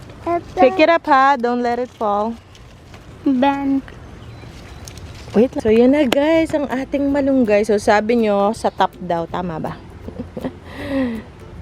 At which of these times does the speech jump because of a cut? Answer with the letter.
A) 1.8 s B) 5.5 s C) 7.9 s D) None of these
B